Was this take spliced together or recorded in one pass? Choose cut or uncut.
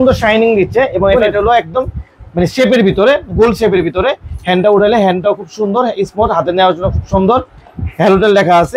cut